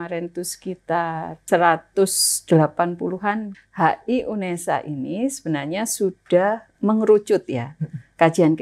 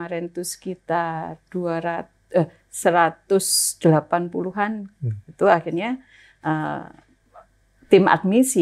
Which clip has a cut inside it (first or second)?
first